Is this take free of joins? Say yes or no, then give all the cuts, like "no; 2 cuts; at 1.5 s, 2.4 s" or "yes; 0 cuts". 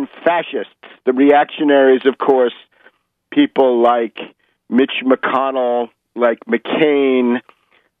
yes; 0 cuts